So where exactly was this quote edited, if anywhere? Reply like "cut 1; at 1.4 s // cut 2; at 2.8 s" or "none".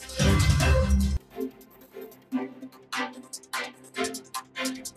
cut 1; at 1.1 s